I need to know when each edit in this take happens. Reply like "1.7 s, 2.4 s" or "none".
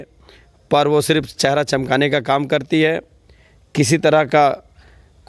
none